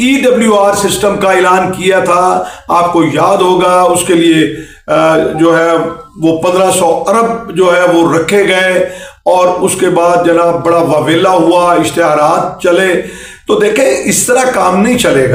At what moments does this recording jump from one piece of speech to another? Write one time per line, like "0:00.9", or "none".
none